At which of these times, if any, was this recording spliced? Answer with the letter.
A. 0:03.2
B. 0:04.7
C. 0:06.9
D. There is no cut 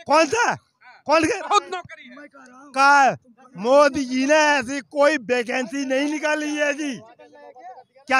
D